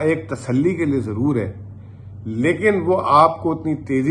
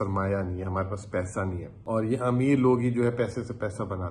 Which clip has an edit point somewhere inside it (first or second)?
second